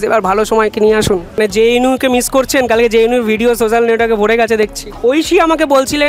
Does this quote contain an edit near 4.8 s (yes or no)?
yes